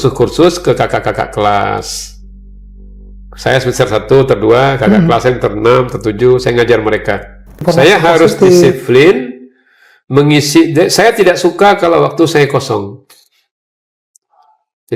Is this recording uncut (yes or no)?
no